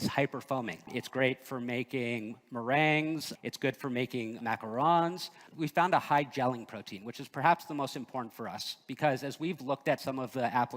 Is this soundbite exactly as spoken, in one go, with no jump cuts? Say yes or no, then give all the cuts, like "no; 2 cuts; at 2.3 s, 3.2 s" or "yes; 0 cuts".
no; 4 cuts; at 1.0 s, 3.3 s, 4.4 s, 5.3 s